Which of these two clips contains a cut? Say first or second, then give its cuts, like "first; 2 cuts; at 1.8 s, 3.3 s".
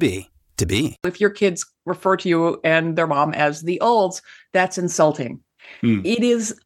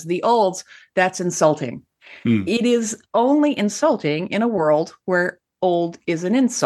first; 1 cut; at 1.1 s